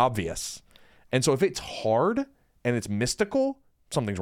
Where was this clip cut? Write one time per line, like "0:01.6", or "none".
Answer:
none